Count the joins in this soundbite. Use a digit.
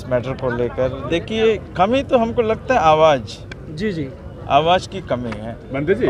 1